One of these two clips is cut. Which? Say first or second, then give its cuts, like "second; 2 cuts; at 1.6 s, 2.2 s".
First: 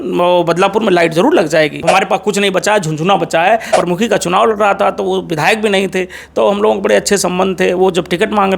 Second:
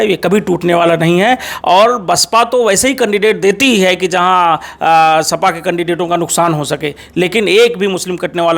first; 2 cuts; at 1.8 s, 3.7 s